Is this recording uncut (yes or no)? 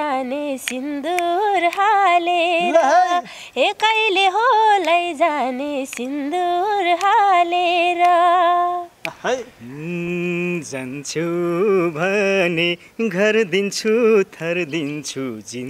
yes